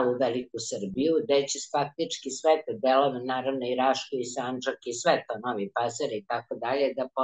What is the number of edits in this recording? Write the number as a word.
zero